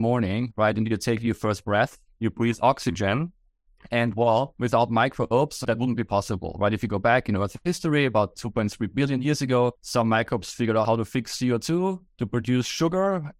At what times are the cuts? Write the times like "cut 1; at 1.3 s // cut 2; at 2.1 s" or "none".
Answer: cut 1; at 4.5 s // cut 2; at 5.6 s // cut 3; at 9.8 s // cut 4; at 10.9 s // cut 5; at 12.1 s